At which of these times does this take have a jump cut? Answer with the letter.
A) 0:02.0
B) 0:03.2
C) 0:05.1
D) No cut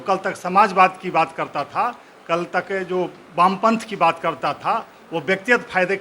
D